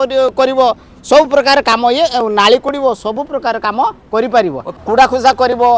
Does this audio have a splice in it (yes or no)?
yes